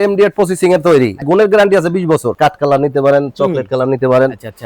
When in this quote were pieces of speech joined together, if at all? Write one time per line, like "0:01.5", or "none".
0:01.3
0:02.3